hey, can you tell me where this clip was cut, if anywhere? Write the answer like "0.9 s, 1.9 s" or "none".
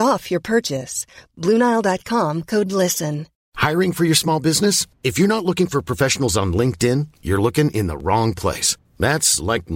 3.3 s